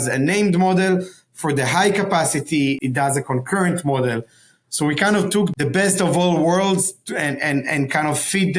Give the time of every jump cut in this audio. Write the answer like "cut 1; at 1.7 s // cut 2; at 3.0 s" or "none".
cut 1; at 2.8 s // cut 2; at 5.5 s